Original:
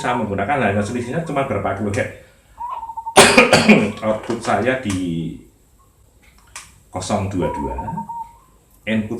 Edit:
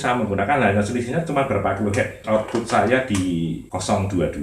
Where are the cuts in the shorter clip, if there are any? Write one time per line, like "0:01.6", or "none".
0:02.2
0:03.6